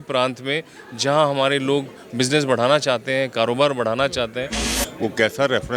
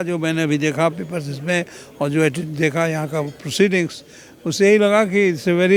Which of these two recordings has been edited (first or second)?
first